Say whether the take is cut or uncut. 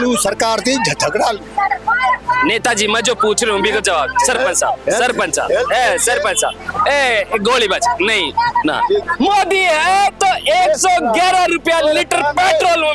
cut